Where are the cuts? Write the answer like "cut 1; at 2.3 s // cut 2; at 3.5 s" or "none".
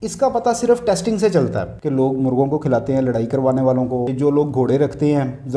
cut 1; at 1.7 s // cut 2; at 4.1 s